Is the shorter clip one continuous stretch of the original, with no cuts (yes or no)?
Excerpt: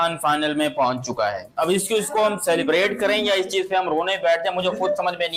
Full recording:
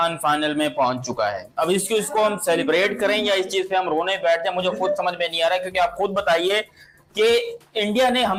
yes